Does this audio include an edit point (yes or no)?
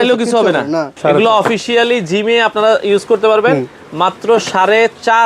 yes